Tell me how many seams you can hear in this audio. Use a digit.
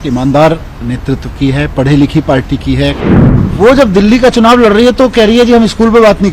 1